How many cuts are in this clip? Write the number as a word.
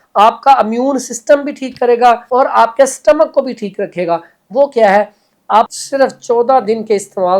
two